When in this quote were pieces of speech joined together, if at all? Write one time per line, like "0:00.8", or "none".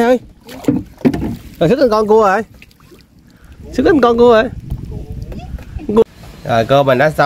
0:06.0

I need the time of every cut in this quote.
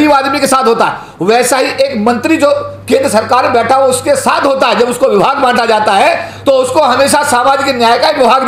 none

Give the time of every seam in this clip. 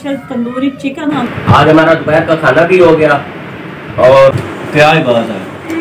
0:01.2
0:04.3

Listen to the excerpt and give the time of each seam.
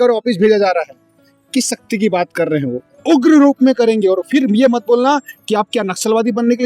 0:02.9

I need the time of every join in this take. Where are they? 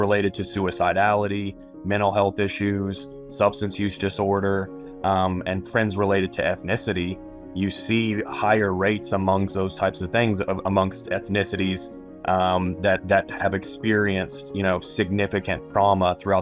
none

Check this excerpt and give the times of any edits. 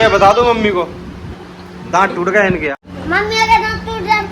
0:02.7

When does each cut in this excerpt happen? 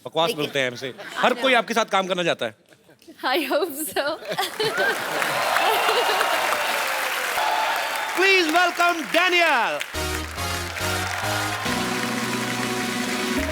0:07.4

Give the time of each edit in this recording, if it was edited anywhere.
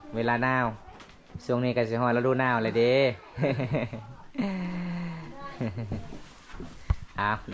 none

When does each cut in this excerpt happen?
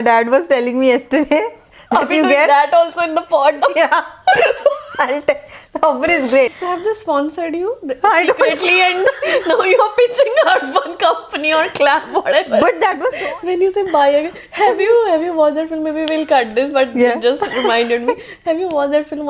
0:06.6
0:13.1

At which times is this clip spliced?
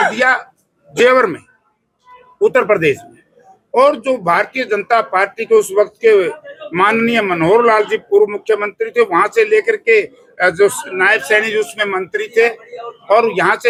none

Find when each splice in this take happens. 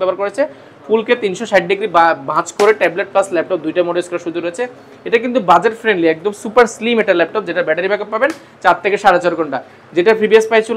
none

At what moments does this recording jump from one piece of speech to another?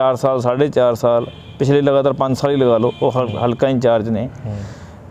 none

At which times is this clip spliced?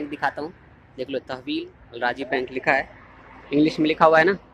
none

